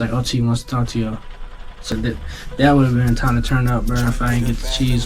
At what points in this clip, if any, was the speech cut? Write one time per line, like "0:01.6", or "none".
0:01.9